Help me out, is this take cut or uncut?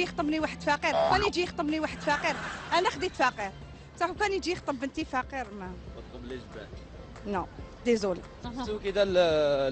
cut